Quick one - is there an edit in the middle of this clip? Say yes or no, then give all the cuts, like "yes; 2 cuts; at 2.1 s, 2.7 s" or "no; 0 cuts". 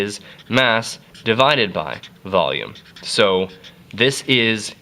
yes; 1 cut; at 2.5 s